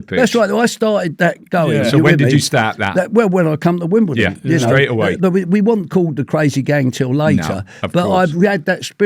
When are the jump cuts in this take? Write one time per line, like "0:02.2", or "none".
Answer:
none